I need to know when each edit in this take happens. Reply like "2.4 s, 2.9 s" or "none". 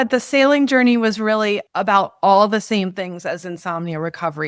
1.7 s